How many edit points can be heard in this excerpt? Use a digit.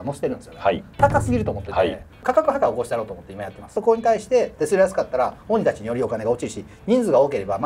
2